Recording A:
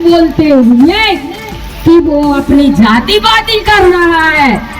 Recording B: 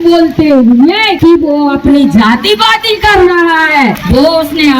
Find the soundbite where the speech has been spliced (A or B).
B